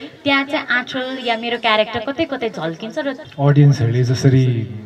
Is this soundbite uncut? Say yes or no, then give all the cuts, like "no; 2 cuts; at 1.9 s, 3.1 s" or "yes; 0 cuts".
no; 1 cut; at 3.2 s